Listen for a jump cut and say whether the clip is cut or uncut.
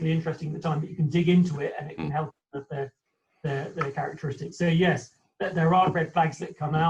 uncut